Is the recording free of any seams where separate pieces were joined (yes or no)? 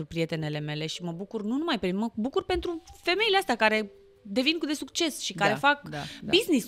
yes